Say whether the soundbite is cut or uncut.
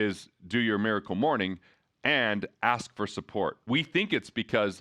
cut